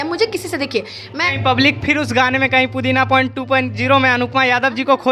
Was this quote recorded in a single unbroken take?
no; 1 cut; at 1.3 s

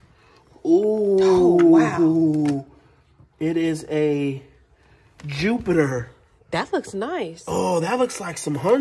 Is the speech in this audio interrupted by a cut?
no; 0 cuts

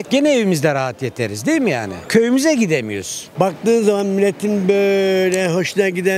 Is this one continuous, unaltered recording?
no; 1 cut; at 3.3 s

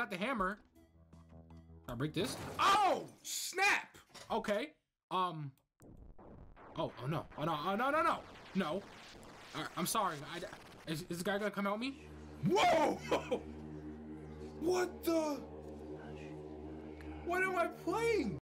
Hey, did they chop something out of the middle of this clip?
no; 0 cuts

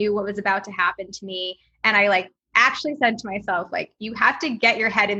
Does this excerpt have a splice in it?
no; 0 cuts

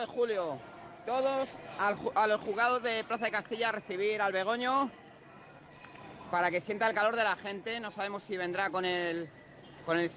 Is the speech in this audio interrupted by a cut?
no; 0 cuts

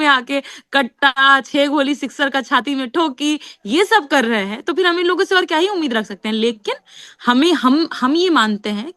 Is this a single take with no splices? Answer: yes; 0 cuts

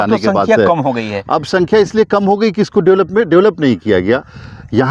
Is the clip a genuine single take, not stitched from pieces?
yes; 0 cuts

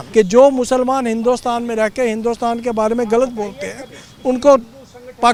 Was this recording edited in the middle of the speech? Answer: no; 0 cuts

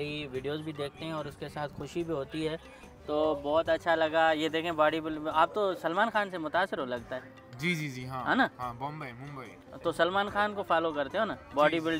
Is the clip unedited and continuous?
no; 1 cut; at 2.8 s

